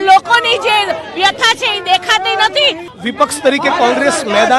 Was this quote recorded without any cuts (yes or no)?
no